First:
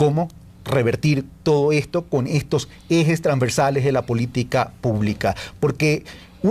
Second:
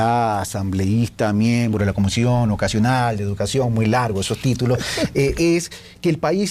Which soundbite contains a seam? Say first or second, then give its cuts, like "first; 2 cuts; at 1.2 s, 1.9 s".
first; 1 cut; at 3.6 s